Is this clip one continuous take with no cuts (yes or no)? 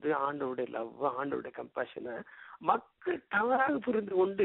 no